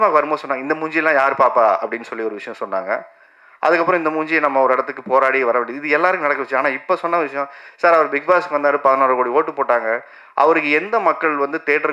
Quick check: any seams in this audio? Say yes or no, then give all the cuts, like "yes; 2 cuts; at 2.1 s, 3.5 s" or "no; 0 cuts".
no; 0 cuts